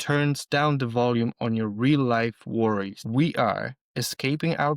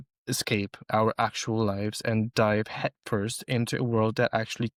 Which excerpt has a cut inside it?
first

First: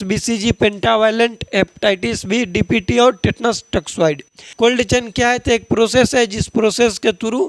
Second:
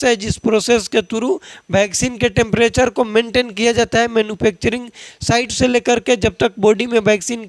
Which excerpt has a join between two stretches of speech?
first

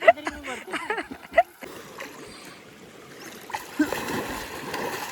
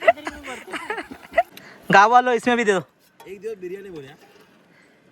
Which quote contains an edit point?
second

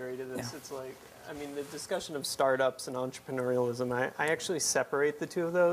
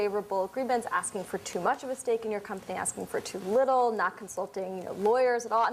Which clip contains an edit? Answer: first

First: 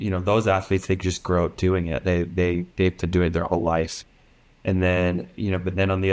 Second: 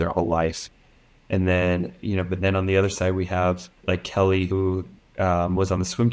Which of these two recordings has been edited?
second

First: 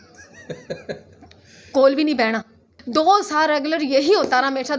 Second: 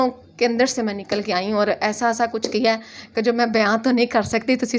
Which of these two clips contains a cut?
first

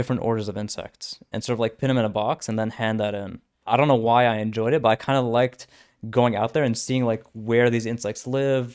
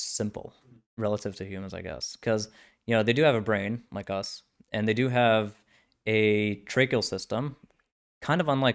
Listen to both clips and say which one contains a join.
first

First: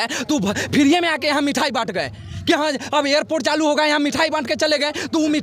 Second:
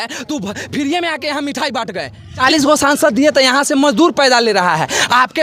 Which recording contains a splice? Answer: second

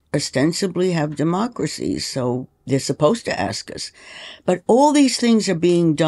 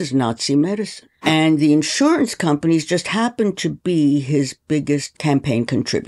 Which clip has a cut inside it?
second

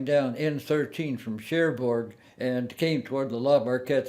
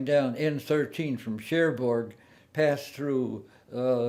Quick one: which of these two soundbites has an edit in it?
first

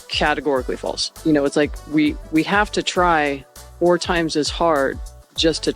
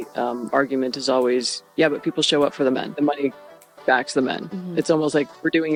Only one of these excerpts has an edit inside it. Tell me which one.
first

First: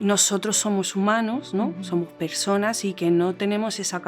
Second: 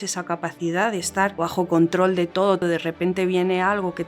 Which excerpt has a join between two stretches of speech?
second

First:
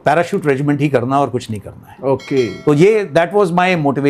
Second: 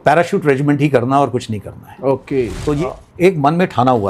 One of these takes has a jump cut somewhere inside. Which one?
second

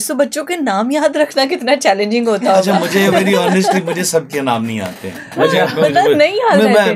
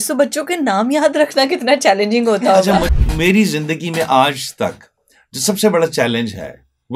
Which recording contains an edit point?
second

